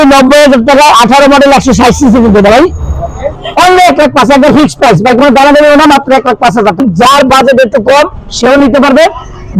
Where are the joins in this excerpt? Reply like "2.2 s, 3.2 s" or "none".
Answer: 3.4 s, 6.8 s